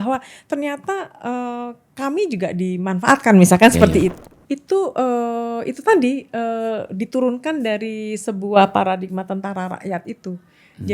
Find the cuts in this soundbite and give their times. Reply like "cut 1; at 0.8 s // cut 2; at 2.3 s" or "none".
cut 1; at 4.2 s